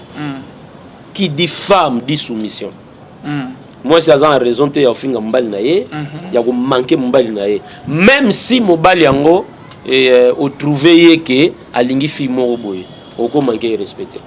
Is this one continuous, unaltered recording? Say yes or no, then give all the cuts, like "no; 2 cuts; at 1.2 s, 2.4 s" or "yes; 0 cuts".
yes; 0 cuts